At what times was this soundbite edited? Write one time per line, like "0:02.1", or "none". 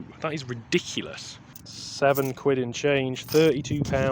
0:01.4

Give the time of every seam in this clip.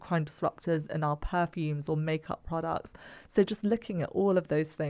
none

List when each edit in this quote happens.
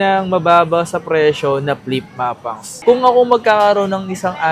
0:02.7

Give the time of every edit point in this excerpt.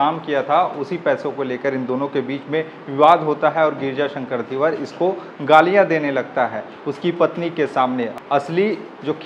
0:08.1

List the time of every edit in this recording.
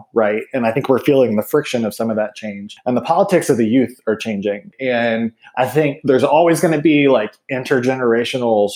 0:02.7
0:04.7

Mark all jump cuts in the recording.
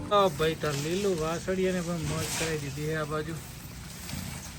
none

